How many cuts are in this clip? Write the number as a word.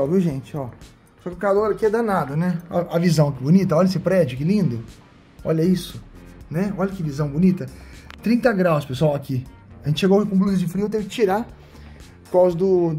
zero